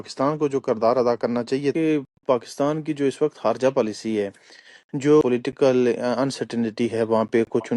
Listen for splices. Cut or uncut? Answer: cut